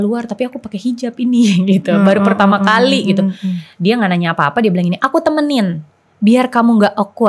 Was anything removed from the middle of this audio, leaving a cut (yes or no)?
no